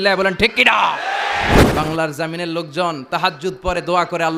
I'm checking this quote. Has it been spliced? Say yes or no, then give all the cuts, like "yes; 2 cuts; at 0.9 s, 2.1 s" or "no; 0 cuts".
yes; 1 cut; at 1.6 s